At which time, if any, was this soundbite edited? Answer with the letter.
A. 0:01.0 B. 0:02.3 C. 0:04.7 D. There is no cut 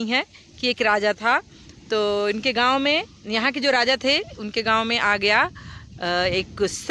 D